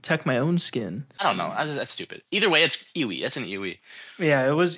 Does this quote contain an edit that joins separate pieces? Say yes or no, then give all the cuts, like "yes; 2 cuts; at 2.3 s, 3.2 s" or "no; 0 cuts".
yes; 1 cut; at 1.1 s